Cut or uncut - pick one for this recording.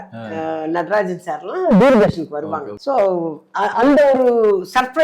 cut